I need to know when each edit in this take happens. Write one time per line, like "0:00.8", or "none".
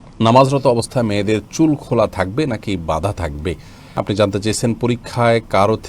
0:04.0